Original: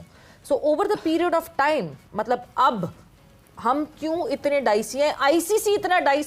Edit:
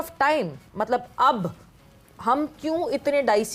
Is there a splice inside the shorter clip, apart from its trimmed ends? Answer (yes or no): no